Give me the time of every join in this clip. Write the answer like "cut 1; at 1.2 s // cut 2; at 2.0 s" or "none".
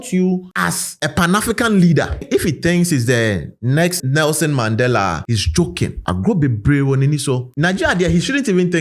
cut 1; at 2.2 s // cut 2; at 7.5 s